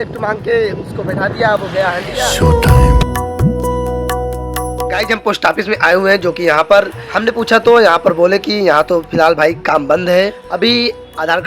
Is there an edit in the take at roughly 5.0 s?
yes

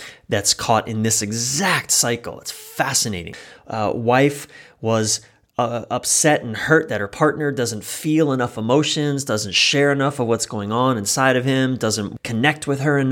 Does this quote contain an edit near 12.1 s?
yes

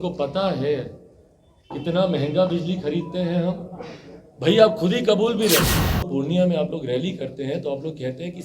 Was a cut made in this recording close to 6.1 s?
yes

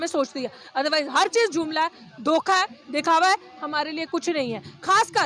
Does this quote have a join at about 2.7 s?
no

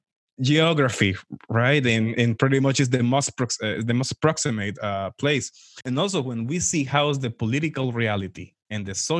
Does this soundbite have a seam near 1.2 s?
no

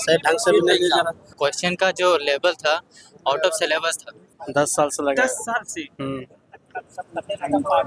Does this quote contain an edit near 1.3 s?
yes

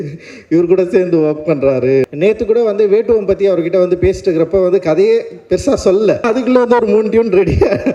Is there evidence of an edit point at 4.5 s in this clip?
no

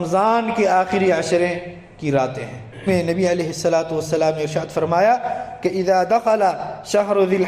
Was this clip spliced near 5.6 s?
no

